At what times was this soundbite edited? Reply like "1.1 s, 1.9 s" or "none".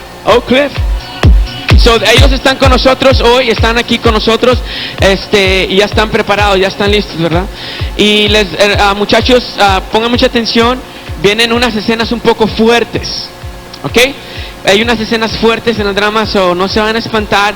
3.2 s